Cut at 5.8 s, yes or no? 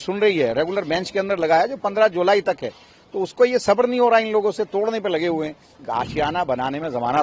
yes